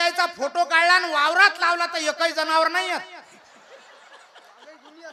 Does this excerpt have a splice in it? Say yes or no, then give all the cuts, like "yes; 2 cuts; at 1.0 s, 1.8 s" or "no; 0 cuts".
no; 0 cuts